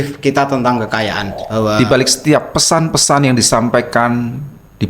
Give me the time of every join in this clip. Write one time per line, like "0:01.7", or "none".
0:01.8